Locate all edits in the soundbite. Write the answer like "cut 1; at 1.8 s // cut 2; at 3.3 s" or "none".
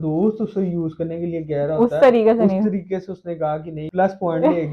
cut 1; at 3.8 s